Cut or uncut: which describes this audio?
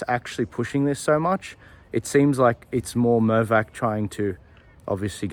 uncut